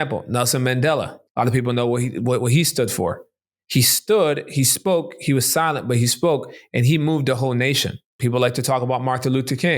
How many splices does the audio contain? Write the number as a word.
two